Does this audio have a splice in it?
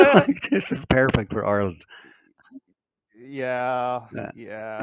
no; 0 cuts

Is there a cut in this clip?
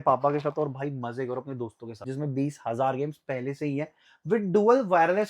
yes; 1 cut; at 2.1 s

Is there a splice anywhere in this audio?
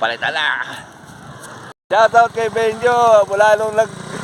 yes; 1 cut; at 1.7 s

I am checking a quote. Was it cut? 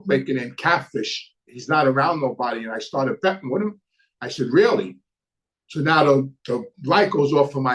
no; 0 cuts

